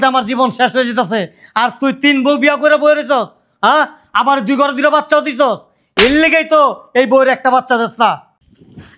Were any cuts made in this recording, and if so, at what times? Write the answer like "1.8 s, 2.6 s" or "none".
none